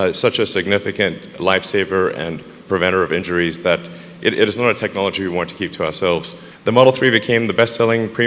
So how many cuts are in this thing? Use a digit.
1